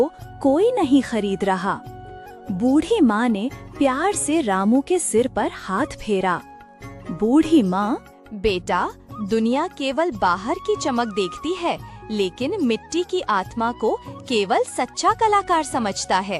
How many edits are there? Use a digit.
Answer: 0